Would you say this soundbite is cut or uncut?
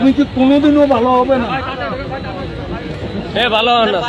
uncut